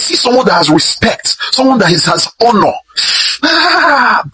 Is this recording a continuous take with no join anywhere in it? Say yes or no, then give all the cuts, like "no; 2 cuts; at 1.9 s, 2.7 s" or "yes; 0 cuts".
yes; 0 cuts